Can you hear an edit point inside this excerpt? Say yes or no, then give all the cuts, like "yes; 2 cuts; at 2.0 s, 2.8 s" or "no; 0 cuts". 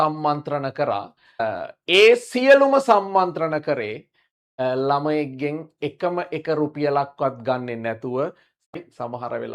yes; 2 cuts; at 1.4 s, 8.7 s